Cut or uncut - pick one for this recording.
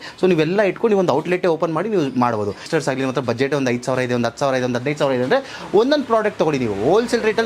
cut